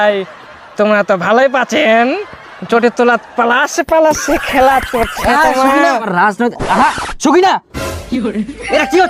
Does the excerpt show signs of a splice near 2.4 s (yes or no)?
no